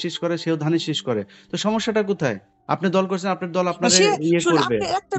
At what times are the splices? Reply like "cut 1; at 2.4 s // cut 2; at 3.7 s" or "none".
none